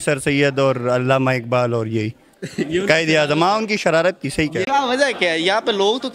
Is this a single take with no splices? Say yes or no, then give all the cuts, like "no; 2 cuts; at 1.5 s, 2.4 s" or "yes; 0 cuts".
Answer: no; 1 cut; at 4.7 s